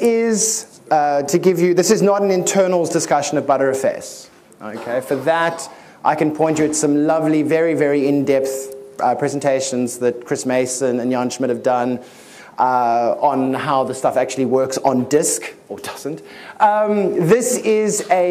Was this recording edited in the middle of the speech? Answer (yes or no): no